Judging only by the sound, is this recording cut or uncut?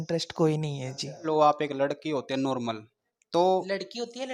cut